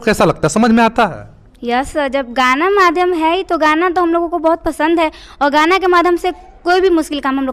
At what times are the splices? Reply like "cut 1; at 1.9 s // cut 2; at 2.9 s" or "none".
none